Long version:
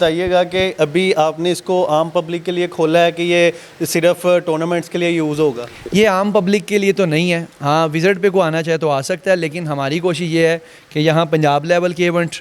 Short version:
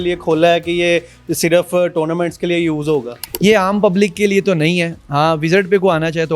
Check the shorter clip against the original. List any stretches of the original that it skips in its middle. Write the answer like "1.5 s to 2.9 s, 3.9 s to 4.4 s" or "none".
none